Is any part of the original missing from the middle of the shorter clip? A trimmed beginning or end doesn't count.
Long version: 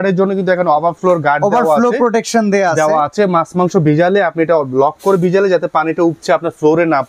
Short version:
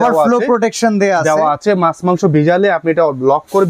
no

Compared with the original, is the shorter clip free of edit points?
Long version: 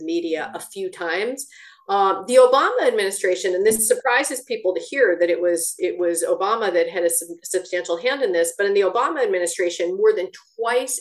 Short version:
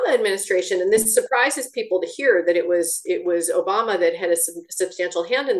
yes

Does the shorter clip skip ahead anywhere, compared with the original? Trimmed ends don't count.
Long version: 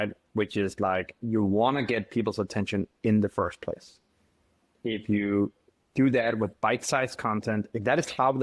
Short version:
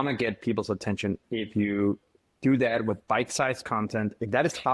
yes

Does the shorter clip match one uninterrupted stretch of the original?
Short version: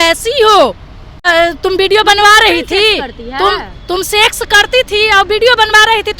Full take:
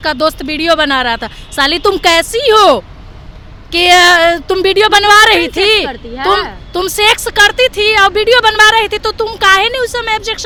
no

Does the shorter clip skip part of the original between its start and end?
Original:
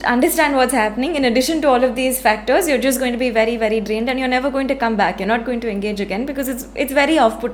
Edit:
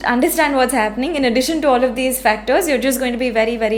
no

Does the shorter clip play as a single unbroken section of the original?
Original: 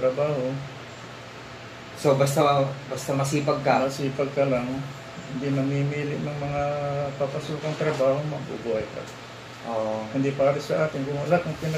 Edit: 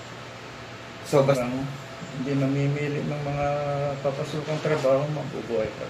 no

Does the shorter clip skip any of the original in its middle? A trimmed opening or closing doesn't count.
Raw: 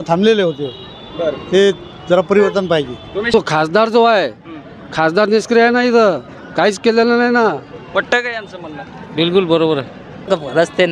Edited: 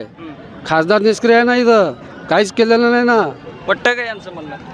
no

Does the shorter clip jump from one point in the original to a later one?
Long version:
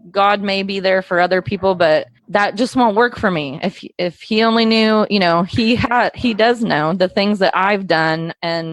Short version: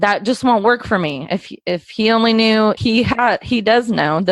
yes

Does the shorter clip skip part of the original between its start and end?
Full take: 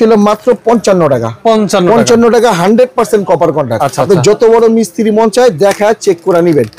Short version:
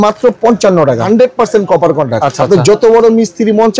yes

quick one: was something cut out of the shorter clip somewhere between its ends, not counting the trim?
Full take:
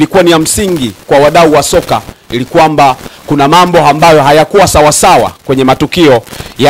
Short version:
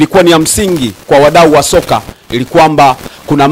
no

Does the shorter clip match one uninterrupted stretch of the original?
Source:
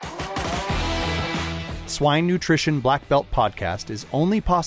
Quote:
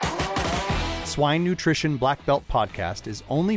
no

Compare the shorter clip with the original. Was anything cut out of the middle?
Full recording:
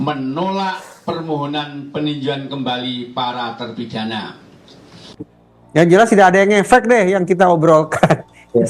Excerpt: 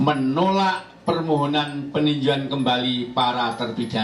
no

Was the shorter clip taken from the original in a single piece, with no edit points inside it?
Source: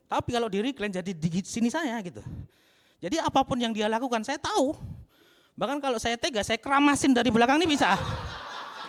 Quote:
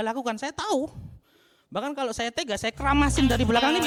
yes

